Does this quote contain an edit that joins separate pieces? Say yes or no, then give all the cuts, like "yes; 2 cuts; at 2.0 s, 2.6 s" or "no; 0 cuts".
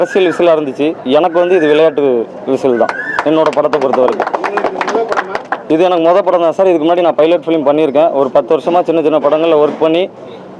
no; 0 cuts